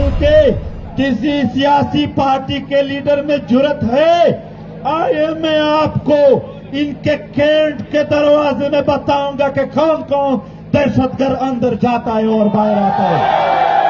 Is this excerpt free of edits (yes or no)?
yes